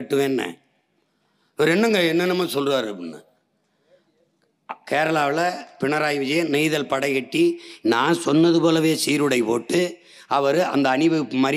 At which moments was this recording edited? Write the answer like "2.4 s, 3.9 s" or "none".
none

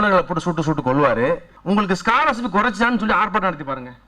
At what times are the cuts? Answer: 1.5 s

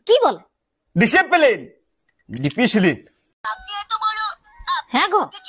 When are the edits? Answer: 3.3 s

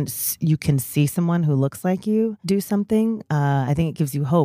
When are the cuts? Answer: 2.4 s

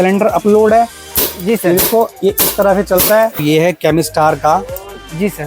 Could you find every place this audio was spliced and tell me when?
3.4 s

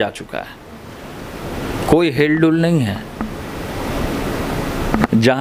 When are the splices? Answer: none

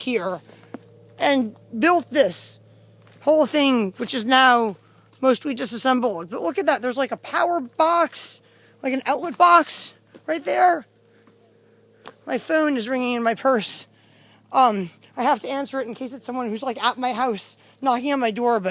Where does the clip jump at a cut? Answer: none

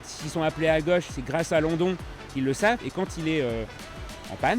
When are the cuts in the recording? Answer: 2.8 s

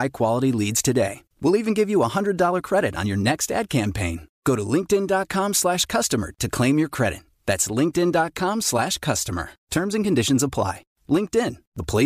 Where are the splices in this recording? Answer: none

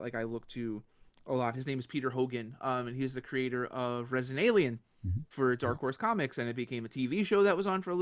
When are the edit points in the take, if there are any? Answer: none

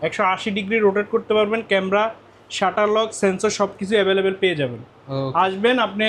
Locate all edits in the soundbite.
none

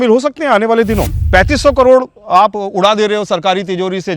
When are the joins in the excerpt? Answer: 1.2 s

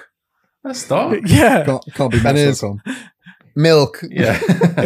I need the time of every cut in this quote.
none

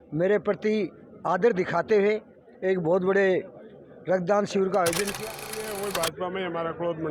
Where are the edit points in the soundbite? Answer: 5.2 s

